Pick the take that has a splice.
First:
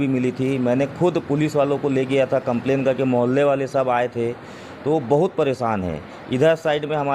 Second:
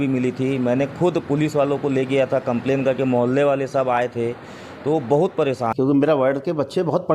second; 1 cut; at 5.7 s

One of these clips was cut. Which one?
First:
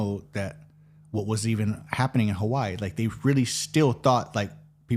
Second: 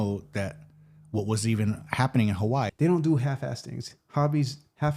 second; 1 cut; at 2.7 s

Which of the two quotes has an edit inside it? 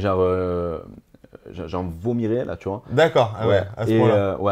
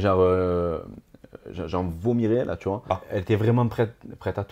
second; 1 cut; at 2.9 s

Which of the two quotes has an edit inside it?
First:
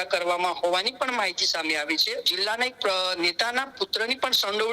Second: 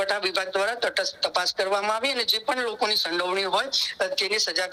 first; 1 cut; at 2.3 s

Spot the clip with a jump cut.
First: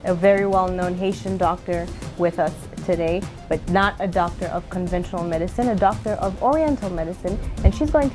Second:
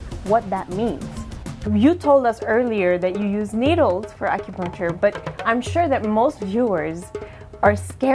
second; 1 cut; at 1.5 s

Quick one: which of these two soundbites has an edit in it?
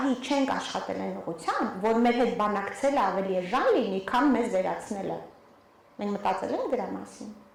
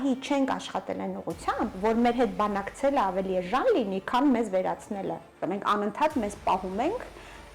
second; 1 cut; at 5.3 s

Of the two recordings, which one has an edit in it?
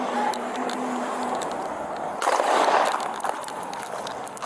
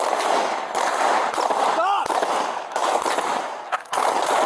first; 1 cut; at 1.4 s

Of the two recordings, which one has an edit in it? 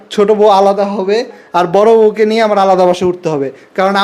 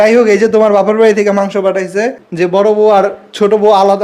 second; 1 cut; at 2.2 s

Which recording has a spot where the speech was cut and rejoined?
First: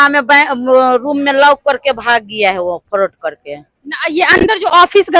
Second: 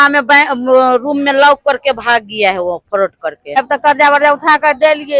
second; 1 cut; at 3.6 s

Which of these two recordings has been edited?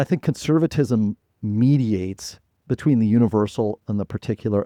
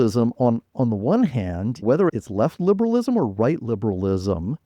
second; 1 cut; at 1.9 s

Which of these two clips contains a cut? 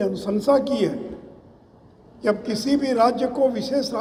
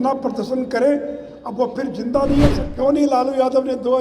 second; 1 cut; at 2.7 s

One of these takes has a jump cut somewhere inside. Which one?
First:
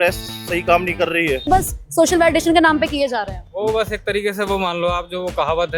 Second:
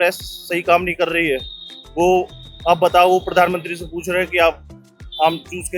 first; 1 cut; at 1.5 s

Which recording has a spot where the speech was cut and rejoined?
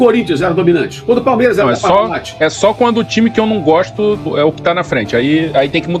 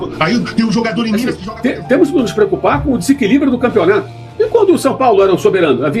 second; 1 cut; at 1.4 s

